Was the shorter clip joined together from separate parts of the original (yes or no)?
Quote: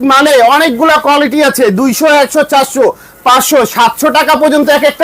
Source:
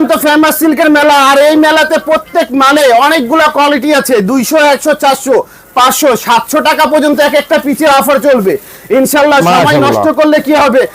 no